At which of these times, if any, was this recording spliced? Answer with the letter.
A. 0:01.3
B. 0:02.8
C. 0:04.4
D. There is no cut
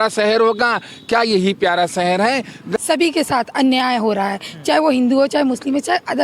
B